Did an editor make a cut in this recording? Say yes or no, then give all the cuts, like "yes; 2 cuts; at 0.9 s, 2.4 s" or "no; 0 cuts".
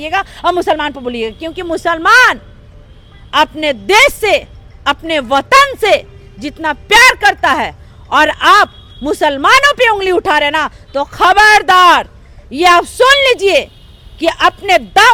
no; 0 cuts